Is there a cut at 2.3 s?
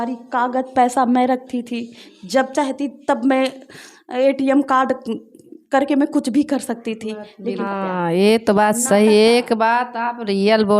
no; 1 cut; at 7.6 s

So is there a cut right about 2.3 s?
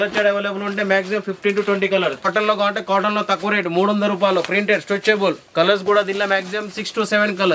yes; 1 cut; at 2.3 s

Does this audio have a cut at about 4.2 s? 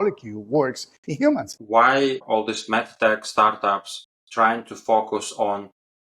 no; 2 cuts; at 1.6 s, 2.2 s

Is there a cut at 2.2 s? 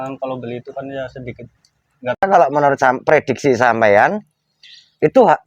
yes; 1 cut; at 2.2 s

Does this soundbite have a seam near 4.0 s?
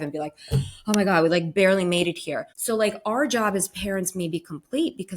no; 1 cut; at 2.5 s

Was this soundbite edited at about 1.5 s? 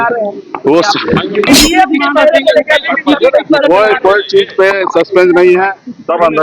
yes; 1 cut; at 1.5 s

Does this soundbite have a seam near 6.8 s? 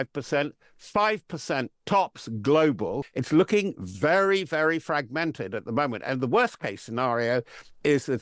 no; 1 cut; at 3.1 s

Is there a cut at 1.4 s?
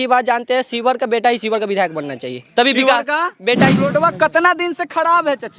no; 1 cut; at 3.8 s

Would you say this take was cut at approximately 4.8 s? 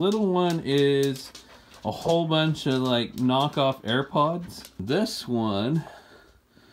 yes; 1 cut; at 4.8 s

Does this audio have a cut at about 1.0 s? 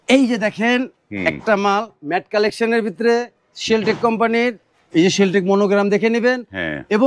no; 0 cuts

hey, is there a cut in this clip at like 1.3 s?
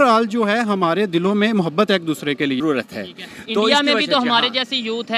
no; 1 cut; at 2.6 s

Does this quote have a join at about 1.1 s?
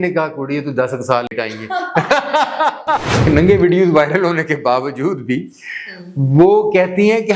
no; 1 cut; at 3.3 s

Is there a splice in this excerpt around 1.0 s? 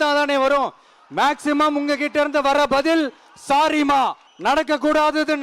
no; 1 cut; at 4.3 s

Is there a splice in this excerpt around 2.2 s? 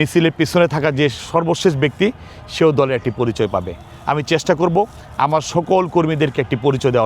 no; 0 cuts

